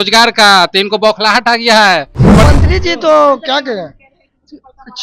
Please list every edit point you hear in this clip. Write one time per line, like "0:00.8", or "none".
0:02.4